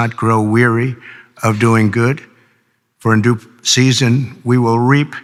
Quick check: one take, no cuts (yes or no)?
yes